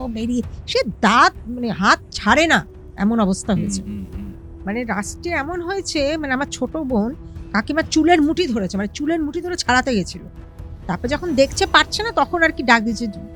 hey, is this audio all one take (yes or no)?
yes